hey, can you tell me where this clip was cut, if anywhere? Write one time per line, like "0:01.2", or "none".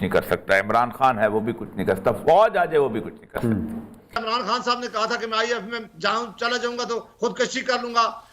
0:04.1